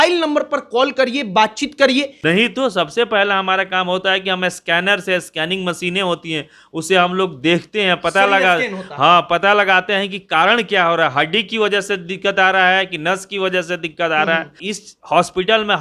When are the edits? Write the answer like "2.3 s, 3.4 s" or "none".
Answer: 2.1 s, 14.6 s

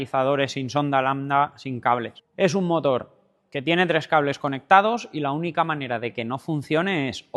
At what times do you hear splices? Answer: 2.2 s

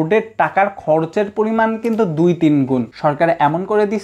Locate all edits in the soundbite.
2.9 s

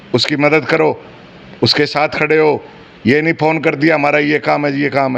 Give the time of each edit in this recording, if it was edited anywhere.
none

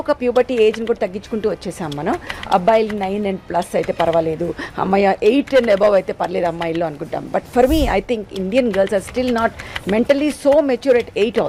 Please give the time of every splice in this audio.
none

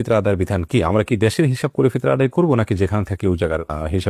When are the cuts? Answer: none

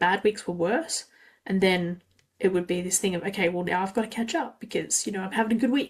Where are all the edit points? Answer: none

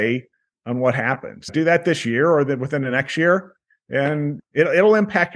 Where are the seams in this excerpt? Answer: 1.5 s, 4.4 s

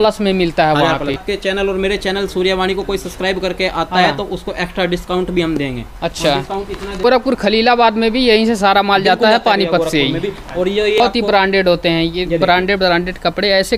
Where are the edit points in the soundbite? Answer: 1.2 s, 7.0 s, 11.0 s

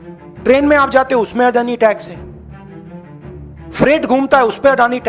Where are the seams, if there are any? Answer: 2.3 s, 3.7 s

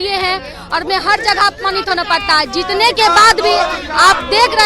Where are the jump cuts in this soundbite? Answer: none

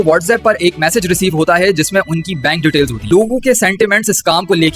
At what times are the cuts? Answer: 3.1 s

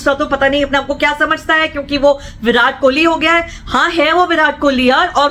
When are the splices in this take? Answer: none

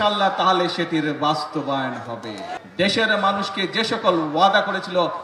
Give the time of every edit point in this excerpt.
2.5 s

